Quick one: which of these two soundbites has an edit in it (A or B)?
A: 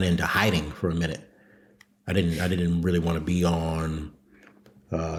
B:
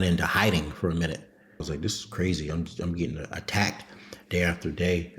B